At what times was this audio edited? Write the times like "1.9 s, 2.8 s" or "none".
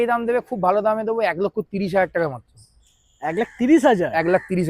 none